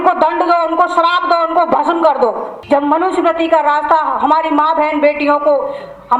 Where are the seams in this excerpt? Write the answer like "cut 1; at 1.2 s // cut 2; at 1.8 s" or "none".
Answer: cut 1; at 2.5 s